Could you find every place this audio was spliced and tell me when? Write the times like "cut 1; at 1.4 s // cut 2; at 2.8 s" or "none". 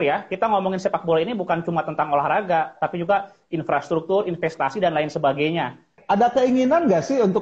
cut 1; at 5.9 s